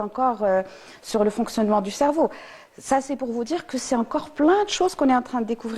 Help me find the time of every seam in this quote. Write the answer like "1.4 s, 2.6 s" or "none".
none